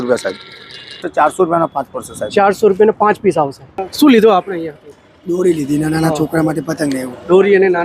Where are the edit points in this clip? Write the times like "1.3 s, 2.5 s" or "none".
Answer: 1.0 s, 3.8 s